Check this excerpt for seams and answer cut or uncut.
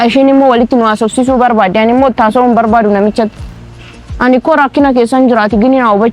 uncut